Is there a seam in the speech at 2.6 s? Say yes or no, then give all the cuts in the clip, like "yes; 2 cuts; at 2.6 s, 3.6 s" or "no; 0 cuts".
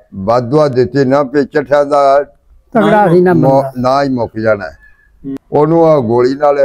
no; 1 cut; at 5.4 s